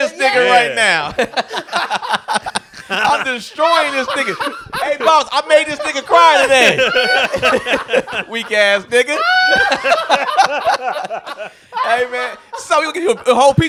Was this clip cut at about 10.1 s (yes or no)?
no